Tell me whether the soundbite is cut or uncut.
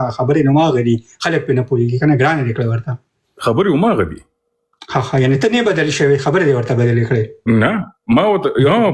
uncut